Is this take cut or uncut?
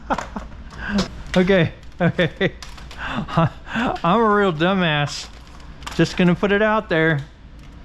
cut